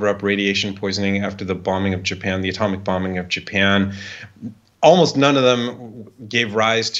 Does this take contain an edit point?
no; 0 cuts

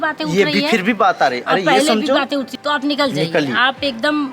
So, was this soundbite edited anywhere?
yes; 1 cut; at 2.5 s

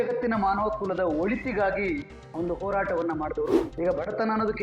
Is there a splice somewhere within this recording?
yes; 1 cut; at 3.6 s

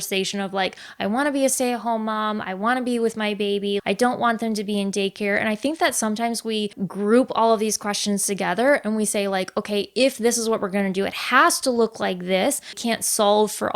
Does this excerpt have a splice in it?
yes; 3 cuts; at 3.8 s, 6.8 s, 12.8 s

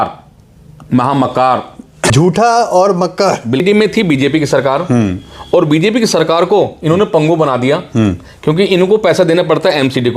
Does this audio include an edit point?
yes; 2 cuts; at 2.1 s, 3.6 s

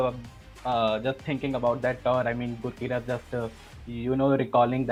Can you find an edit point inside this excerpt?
no; 0 cuts

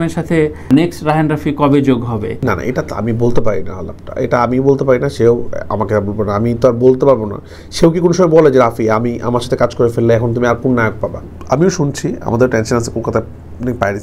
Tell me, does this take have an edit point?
yes; 1 cut; at 11.3 s

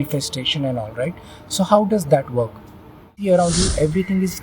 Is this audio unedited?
no; 1 cut; at 3.1 s

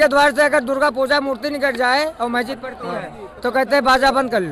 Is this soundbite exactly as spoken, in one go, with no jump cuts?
yes; 0 cuts

